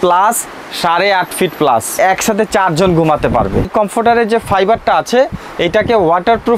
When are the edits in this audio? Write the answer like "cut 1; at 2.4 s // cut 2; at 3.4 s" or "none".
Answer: cut 1; at 2.0 s // cut 2; at 3.7 s